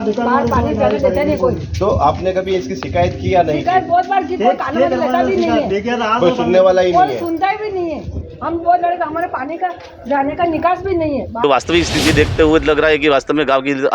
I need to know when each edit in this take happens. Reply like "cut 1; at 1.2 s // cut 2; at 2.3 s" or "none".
cut 1; at 11.4 s